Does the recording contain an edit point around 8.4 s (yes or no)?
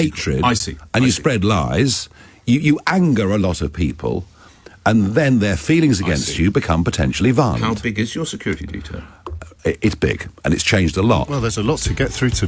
no